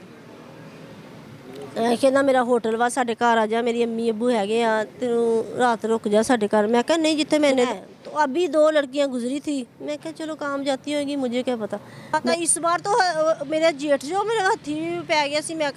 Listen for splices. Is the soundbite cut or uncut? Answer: cut